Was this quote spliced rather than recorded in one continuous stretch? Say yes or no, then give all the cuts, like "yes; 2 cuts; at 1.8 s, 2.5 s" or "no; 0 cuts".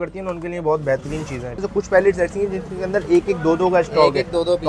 yes; 1 cut; at 1.6 s